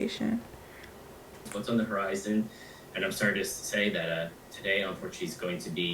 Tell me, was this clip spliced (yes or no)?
yes